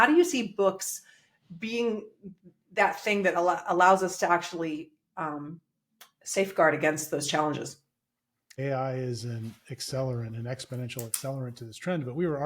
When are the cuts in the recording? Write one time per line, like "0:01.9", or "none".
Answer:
0:08.5